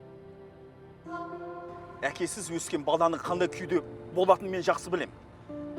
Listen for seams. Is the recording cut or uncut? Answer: cut